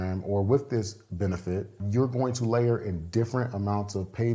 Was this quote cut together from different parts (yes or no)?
yes